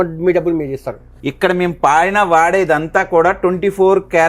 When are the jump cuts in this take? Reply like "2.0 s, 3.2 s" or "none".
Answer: 1.2 s